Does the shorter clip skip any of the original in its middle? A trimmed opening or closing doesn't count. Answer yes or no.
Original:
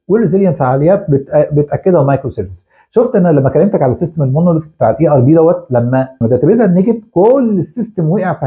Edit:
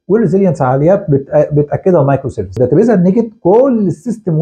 yes